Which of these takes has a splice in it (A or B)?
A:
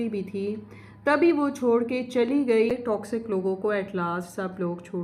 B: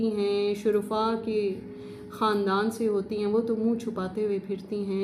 A